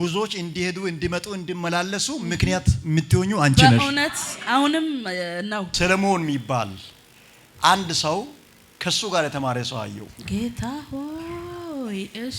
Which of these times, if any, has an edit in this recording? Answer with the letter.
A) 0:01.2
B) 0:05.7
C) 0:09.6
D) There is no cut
B